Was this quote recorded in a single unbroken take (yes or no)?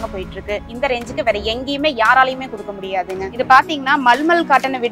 no